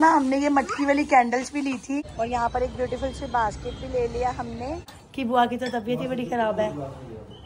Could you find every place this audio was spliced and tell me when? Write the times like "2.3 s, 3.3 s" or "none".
2.1 s, 5.0 s